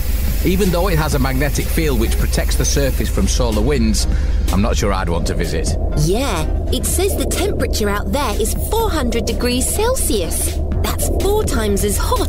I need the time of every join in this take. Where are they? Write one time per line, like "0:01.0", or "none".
none